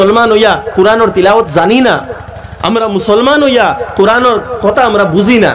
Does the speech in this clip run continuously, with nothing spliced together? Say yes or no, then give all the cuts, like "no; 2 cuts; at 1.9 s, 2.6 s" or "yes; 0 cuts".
yes; 0 cuts